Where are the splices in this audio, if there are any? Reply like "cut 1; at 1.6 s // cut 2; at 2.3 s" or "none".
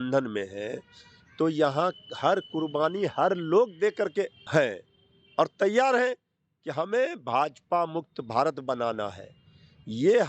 cut 1; at 4.4 s